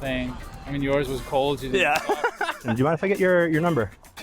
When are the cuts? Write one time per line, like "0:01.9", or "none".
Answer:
0:02.7